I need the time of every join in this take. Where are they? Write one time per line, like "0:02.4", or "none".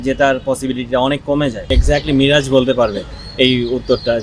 0:01.7